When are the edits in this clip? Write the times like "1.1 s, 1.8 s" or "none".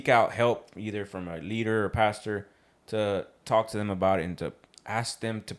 4.7 s